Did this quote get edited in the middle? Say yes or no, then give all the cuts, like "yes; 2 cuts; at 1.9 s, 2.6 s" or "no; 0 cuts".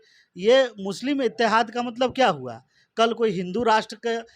no; 0 cuts